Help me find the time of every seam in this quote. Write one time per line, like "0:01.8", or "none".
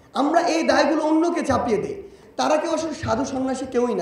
0:02.1